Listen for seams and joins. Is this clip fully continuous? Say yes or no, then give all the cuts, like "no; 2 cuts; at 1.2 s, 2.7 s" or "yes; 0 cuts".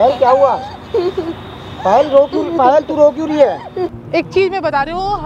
no; 1 cut; at 3.9 s